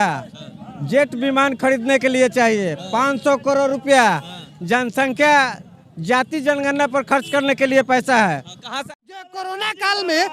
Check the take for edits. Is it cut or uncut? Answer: cut